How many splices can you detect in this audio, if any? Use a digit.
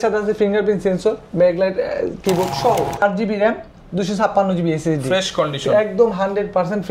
1